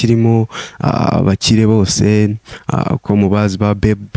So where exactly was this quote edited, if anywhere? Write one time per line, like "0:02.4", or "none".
none